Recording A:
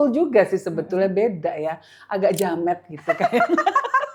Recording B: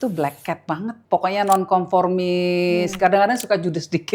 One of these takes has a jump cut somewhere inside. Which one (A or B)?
B